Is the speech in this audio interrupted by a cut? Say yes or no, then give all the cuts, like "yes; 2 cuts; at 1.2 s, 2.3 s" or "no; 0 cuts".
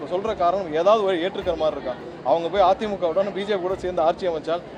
no; 0 cuts